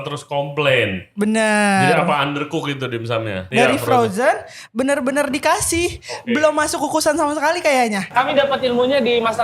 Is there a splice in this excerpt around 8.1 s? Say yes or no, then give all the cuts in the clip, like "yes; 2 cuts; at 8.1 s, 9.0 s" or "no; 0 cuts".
yes; 2 cuts; at 3.4 s, 8.1 s